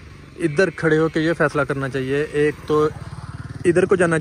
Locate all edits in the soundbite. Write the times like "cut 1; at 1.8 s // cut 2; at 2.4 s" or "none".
none